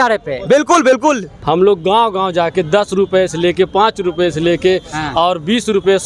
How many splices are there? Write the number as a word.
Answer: one